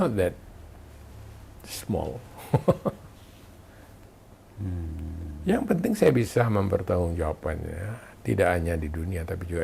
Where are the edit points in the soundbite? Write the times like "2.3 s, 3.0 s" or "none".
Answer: 4.4 s